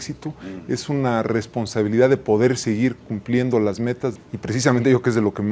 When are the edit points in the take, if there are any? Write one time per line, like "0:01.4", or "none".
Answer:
0:04.2